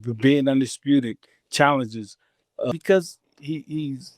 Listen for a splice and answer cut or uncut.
cut